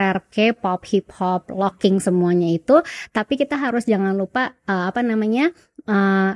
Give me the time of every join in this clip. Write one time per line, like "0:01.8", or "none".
none